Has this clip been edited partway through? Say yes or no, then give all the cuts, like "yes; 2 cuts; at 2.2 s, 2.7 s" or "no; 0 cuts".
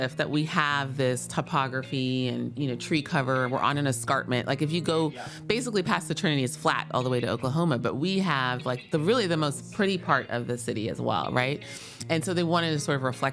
no; 0 cuts